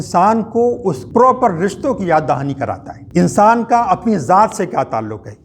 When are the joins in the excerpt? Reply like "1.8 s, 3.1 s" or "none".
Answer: 1.0 s, 2.9 s